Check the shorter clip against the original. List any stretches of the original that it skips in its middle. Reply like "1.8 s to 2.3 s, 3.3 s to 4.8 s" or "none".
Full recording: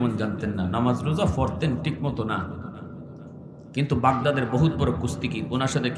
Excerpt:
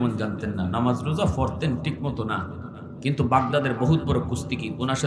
2.8 s to 3.6 s

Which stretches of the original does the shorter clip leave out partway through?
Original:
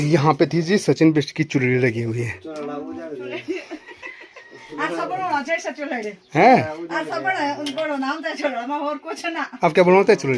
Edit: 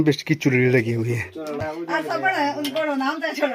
2.7 s to 6.6 s

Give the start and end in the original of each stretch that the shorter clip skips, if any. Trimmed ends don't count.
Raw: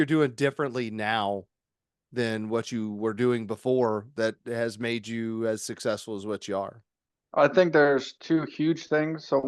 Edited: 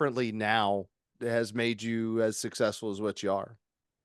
1.7 s to 4.4 s

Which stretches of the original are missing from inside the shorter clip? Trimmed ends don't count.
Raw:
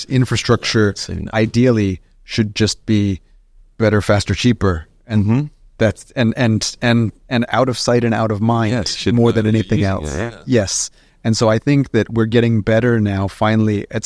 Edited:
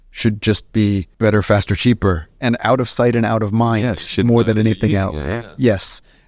3.2 s to 3.7 s, 4.9 s to 7.2 s

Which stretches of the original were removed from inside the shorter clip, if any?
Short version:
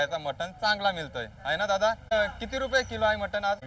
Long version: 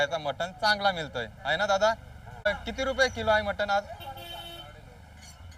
2.1 s to 2.3 s

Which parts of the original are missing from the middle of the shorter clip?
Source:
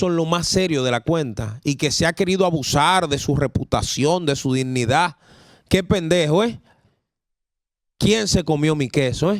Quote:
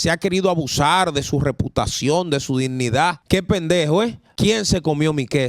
5.2 s to 5.6 s, 6.6 s to 7.9 s

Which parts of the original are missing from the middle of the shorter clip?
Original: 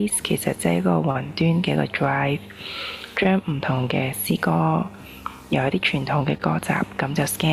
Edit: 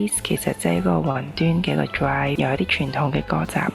2.3 s to 5.5 s

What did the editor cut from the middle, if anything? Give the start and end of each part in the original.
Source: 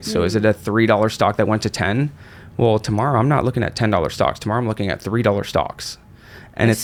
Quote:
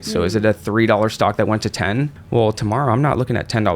2.2 s to 2.4 s

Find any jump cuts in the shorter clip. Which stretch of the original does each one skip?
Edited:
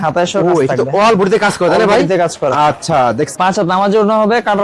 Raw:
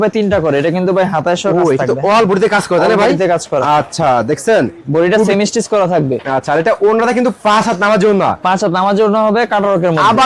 4.4 s to 8.4 s

